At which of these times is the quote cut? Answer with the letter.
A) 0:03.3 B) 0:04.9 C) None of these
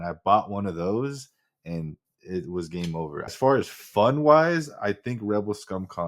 A